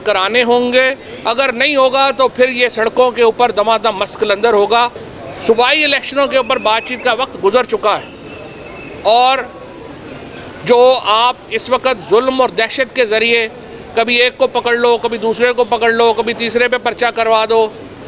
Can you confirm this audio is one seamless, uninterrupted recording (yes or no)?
no